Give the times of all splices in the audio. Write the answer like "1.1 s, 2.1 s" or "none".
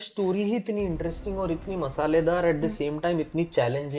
none